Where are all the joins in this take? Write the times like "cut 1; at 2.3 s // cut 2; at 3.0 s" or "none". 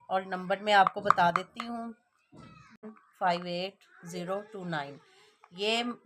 cut 1; at 3.0 s

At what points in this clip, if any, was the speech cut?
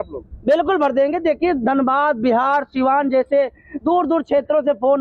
none

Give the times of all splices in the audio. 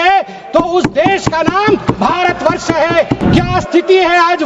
cut 1; at 3.2 s

